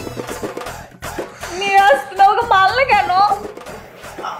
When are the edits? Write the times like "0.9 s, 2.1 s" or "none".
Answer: none

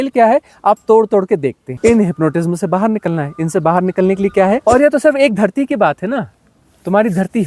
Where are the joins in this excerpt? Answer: 1.7 s, 4.6 s

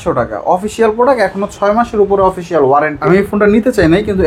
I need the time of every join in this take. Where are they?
3.0 s

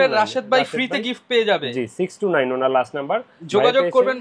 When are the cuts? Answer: none

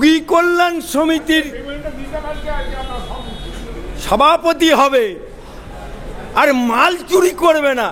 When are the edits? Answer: none

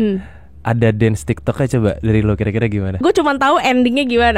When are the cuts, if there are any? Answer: 3.0 s

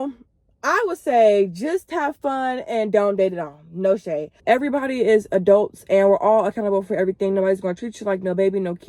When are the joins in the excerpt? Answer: 4.3 s

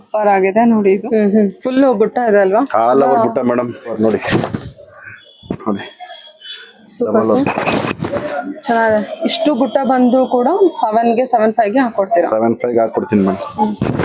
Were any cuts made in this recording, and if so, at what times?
1.0 s, 3.9 s

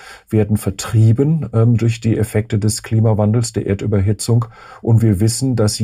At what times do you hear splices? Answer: none

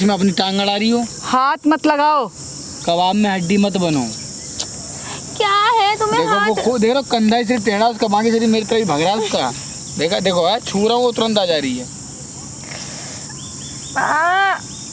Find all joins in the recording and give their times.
none

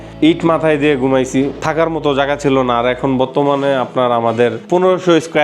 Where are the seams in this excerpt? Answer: 1.6 s

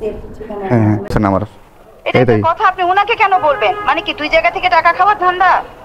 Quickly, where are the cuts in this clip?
1.1 s

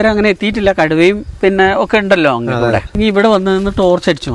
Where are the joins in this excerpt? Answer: 3.0 s

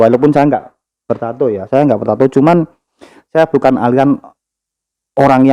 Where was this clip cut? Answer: none

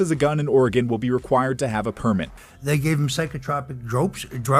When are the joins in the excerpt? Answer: 2.4 s

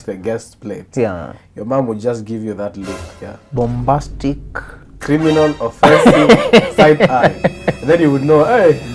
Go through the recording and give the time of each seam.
none

